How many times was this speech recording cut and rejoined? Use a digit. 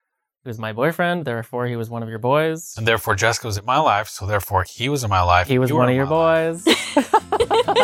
1